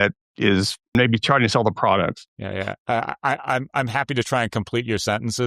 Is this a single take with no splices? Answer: no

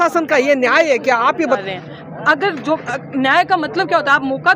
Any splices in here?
yes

